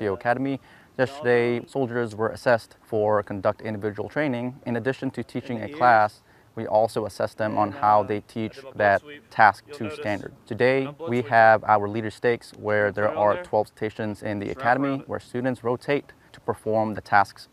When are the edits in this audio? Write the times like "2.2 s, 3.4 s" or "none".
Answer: 1.6 s, 2.8 s, 4.6 s, 10.4 s, 11.0 s, 16.3 s